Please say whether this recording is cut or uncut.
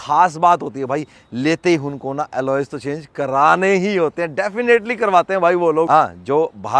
uncut